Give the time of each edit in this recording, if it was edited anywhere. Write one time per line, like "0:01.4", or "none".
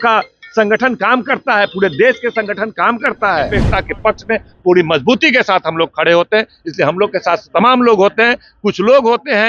0:03.6

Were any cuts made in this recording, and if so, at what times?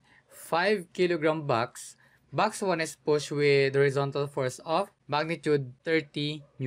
0:05.0
0:05.8

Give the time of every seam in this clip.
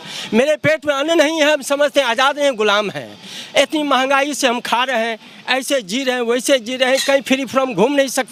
none

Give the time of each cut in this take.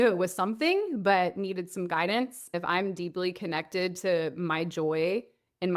0:02.5

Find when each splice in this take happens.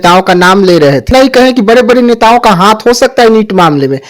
0:01.1

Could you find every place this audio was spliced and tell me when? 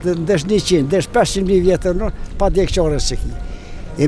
none

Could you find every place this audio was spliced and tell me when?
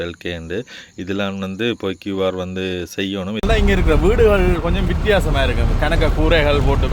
0:03.4

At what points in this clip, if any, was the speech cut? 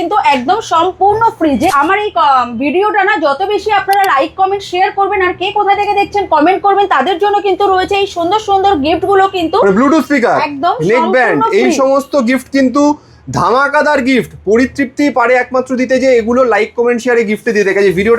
0:01.7

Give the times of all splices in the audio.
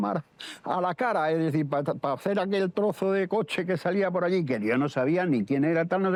none

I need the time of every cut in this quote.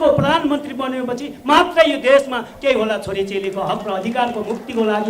none

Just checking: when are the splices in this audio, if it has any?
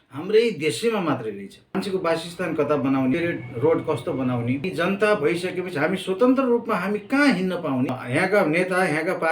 0:01.6
0:03.1
0:04.7
0:08.0

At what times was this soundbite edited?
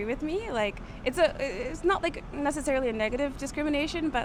none

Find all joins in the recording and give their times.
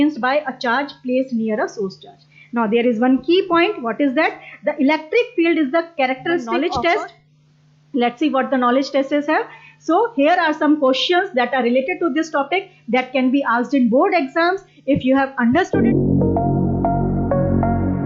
0:06.5
0:15.7

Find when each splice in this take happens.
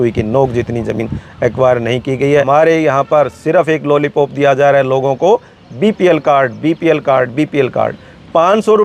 0:02.5

